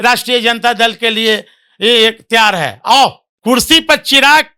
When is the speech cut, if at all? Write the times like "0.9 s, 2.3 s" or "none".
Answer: 3.3 s